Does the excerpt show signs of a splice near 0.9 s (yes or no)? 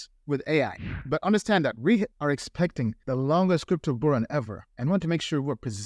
yes